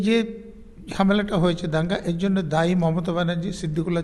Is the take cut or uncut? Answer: uncut